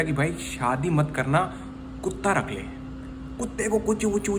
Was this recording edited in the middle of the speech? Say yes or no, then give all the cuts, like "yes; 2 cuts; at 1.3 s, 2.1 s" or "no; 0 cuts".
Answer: no; 0 cuts